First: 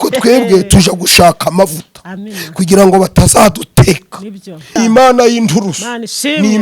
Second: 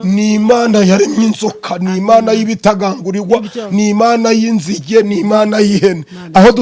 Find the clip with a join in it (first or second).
first